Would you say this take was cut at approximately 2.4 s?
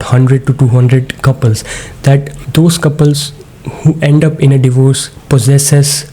yes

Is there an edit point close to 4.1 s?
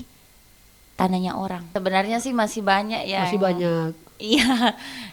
no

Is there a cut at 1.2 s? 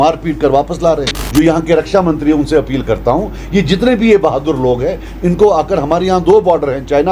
yes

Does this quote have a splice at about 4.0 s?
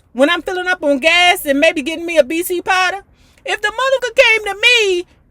yes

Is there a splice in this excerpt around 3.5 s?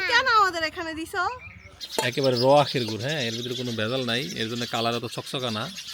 no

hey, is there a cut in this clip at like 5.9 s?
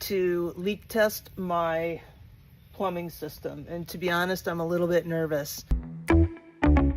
yes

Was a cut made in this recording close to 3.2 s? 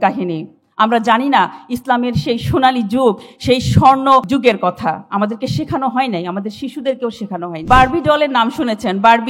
no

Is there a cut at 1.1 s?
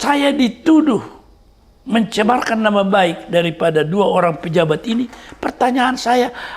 no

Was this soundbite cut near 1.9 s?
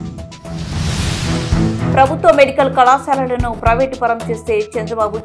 yes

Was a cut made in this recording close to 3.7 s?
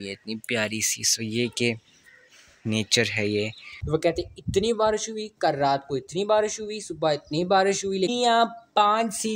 yes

